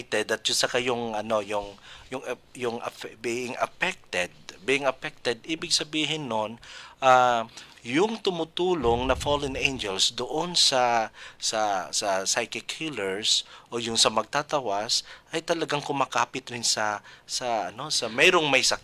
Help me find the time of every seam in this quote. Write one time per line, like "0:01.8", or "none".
none